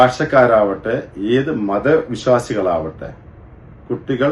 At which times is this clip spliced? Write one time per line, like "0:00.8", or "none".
none